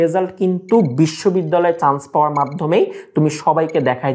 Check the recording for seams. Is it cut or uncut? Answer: uncut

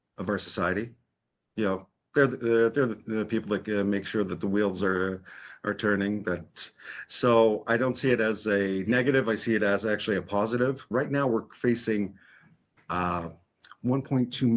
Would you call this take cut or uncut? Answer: cut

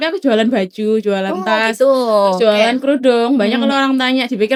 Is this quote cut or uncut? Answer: uncut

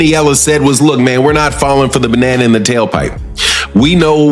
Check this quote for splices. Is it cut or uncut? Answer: cut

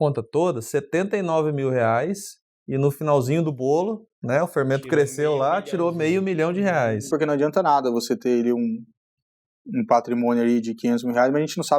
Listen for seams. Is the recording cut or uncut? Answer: cut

